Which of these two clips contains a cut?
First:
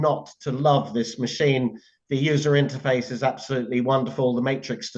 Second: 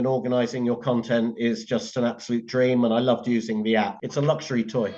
second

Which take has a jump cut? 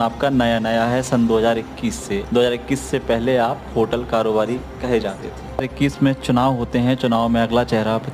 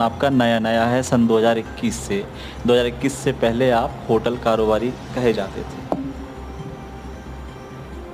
first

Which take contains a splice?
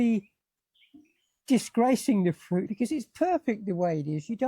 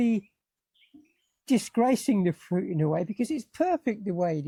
first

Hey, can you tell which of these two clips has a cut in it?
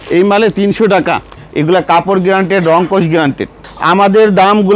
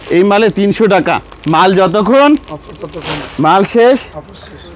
first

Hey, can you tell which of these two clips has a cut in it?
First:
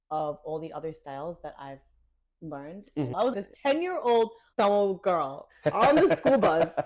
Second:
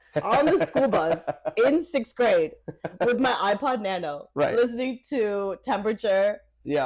first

